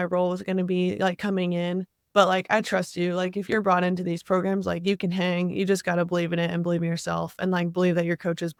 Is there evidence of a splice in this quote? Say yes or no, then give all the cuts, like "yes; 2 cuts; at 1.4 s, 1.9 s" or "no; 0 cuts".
no; 0 cuts